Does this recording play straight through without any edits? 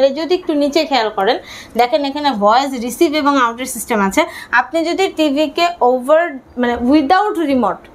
yes; 0 cuts

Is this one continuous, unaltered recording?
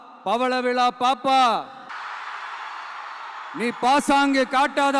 no; 1 cut; at 1.9 s

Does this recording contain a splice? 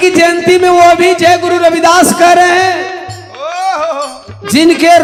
no; 0 cuts

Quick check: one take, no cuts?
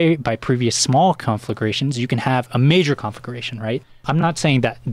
no; 1 cut; at 3.9 s

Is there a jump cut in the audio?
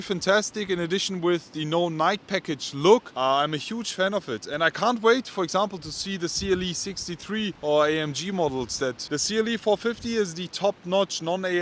no; 0 cuts

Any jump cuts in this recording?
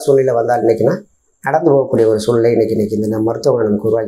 no; 0 cuts

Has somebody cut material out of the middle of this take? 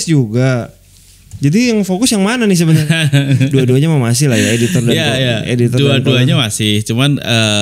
yes; 1 cut; at 2.8 s

